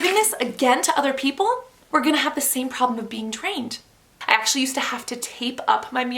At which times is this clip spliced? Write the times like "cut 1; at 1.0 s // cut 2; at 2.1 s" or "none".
cut 1; at 4.1 s